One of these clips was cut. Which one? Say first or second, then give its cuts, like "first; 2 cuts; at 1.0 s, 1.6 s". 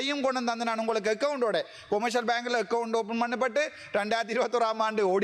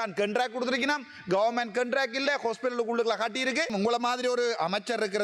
second; 1 cut; at 3.7 s